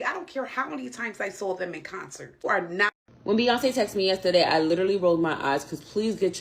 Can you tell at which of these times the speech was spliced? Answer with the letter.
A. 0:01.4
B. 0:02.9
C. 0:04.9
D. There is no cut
B